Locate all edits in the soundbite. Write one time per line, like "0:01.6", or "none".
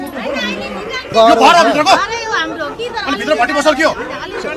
0:01.1